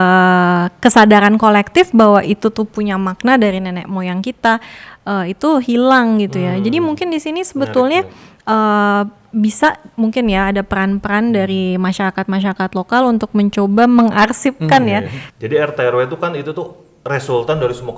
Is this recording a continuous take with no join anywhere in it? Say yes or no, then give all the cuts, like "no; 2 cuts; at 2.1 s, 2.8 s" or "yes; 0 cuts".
no; 1 cut; at 15.2 s